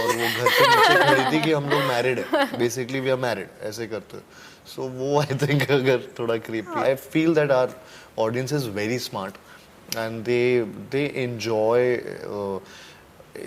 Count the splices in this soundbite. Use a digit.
1